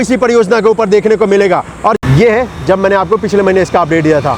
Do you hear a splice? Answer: yes; 1 cut; at 2.0 s

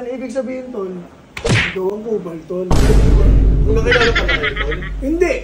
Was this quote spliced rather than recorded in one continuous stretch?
no; 0 cuts

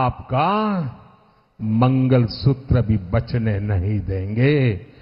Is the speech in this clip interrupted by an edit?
no; 0 cuts

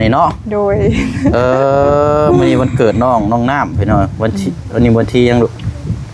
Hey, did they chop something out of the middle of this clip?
no; 0 cuts

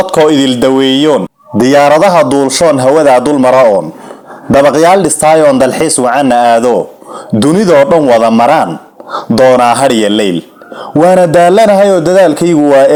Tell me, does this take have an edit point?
no; 0 cuts

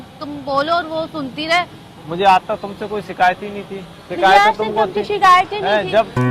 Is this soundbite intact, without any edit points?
no; 1 cut; at 1.9 s

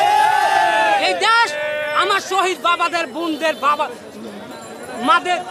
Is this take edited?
no; 0 cuts

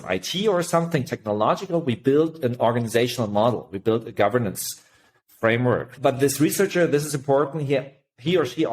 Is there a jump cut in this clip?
yes; 1 cut; at 5.9 s

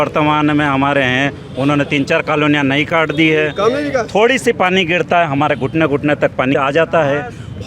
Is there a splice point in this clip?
yes; 1 cut; at 6.5 s

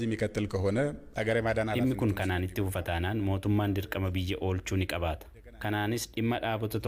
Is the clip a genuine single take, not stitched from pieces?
yes; 0 cuts

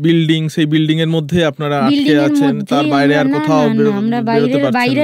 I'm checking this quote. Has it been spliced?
no; 0 cuts

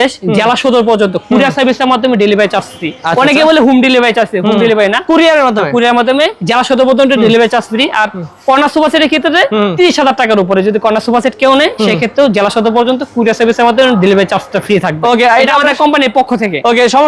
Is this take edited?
no; 0 cuts

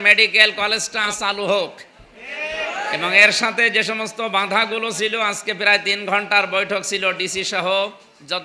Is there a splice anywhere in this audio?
yes; 1 cut; at 1.1 s

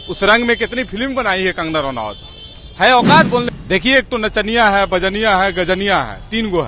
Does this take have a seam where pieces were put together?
yes; 1 cut; at 3.5 s

